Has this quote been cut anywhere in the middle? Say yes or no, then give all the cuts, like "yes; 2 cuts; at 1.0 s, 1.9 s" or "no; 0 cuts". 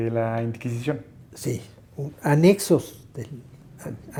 no; 0 cuts